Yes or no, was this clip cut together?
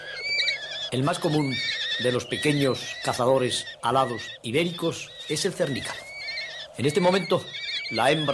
yes